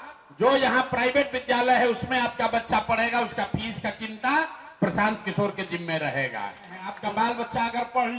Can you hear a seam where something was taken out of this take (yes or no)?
yes